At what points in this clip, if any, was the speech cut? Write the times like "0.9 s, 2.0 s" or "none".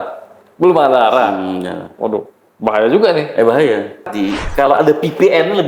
4.1 s